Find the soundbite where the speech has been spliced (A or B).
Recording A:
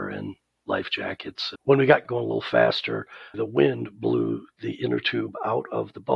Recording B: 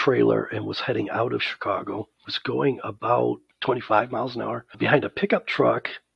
A